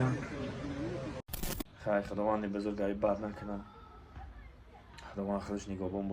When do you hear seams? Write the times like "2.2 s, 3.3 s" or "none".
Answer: 1.2 s